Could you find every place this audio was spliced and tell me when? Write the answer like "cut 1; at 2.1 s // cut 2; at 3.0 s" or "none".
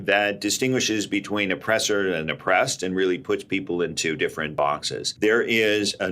cut 1; at 4.7 s